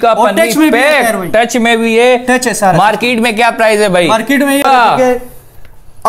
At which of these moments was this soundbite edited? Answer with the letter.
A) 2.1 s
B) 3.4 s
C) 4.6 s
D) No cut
C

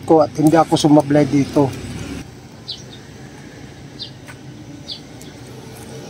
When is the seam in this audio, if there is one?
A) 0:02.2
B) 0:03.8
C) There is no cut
A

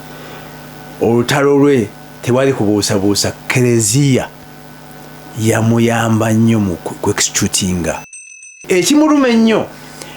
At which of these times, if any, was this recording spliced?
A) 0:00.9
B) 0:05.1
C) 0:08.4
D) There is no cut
C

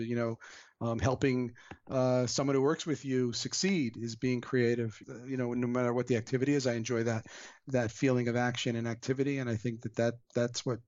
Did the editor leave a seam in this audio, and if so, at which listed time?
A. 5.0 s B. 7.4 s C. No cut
A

